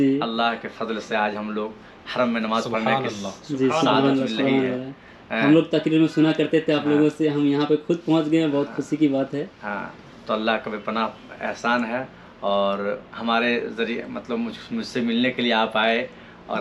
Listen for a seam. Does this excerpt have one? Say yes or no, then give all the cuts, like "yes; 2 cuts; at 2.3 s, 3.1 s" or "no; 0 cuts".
no; 0 cuts